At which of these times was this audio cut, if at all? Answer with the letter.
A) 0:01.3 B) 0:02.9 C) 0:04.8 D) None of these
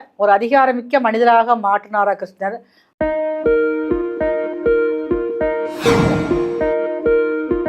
B